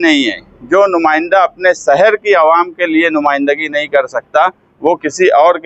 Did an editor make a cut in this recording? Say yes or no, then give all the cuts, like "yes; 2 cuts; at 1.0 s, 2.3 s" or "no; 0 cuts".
no; 0 cuts